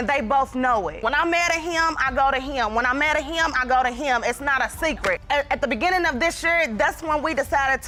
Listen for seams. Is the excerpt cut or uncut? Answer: uncut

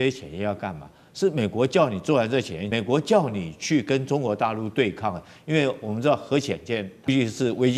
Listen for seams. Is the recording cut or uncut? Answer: cut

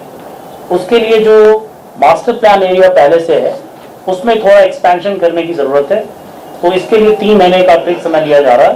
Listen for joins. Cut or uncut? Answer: uncut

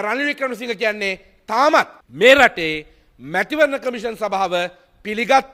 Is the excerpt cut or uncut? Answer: cut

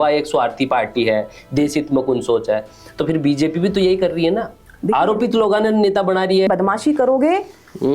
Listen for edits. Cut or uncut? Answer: cut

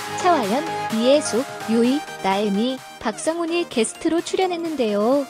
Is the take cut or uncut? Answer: uncut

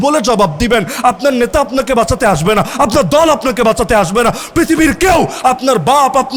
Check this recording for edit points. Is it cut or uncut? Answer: uncut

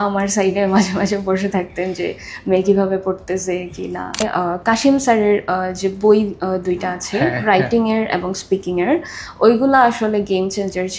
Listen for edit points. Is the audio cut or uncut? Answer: cut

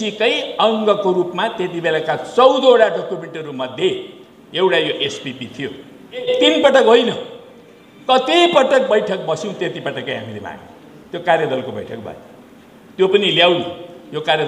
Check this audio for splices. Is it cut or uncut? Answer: cut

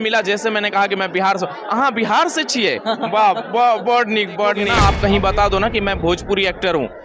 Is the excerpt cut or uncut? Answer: cut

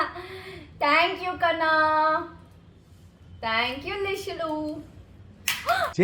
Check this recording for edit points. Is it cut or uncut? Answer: uncut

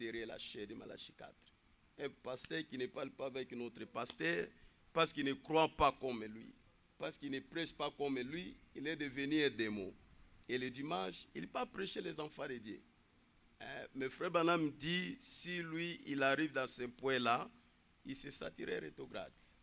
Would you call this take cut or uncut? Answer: uncut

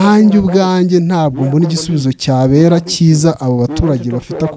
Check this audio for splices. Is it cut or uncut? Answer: uncut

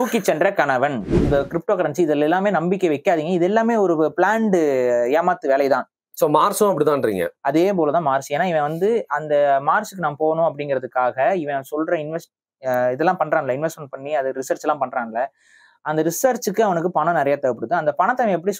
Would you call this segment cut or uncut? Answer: cut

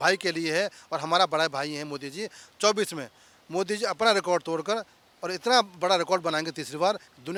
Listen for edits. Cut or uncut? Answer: uncut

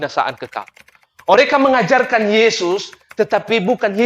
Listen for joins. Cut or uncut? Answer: cut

